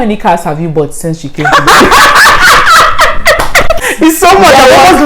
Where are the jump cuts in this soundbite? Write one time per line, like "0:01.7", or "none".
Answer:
0:03.8